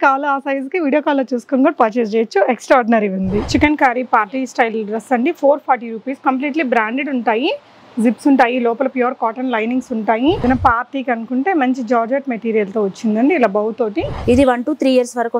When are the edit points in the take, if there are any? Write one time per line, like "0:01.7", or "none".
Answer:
0:03.4
0:10.4
0:14.1